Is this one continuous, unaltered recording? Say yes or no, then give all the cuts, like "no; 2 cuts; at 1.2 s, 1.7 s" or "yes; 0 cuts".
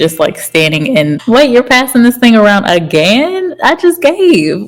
no; 1 cut; at 1.2 s